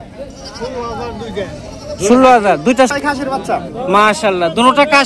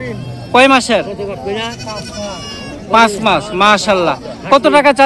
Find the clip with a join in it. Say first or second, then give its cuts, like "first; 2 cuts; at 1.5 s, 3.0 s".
first; 1 cut; at 2.9 s